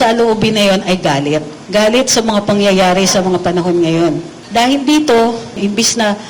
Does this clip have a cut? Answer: yes; 3 cuts; at 1.6 s, 4.3 s, 5.6 s

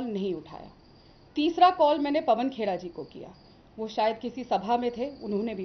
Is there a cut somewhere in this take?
no; 0 cuts

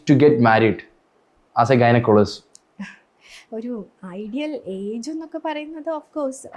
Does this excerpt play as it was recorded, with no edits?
yes; 0 cuts

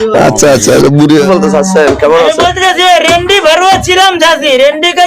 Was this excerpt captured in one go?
no; 1 cut; at 1.3 s

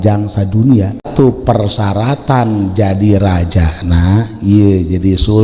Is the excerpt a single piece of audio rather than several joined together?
no; 1 cut; at 1.1 s

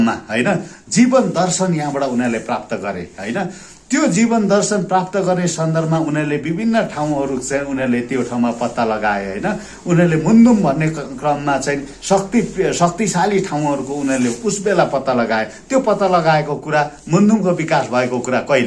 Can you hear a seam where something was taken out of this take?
no; 0 cuts

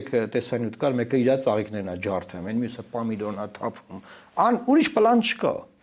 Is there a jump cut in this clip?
no; 0 cuts

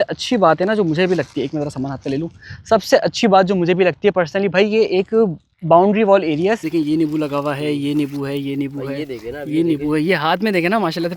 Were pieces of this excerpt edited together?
yes; 1 cut; at 6.7 s

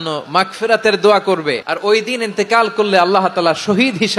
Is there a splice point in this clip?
yes; 1 cut; at 1.7 s

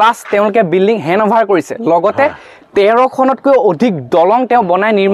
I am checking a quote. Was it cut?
no; 0 cuts

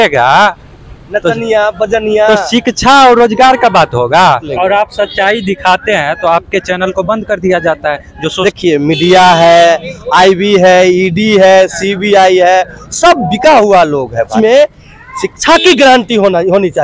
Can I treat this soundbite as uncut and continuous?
no; 3 cuts; at 4.5 s, 8.4 s, 14.3 s

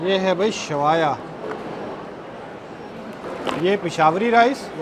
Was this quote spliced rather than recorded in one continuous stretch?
no; 0 cuts

